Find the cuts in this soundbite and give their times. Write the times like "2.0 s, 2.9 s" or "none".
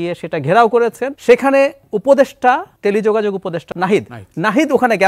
1.1 s, 2.7 s, 3.7 s